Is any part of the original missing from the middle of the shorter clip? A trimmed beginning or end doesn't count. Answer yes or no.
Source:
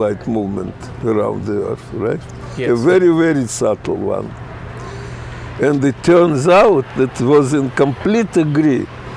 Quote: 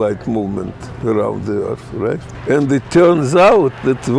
yes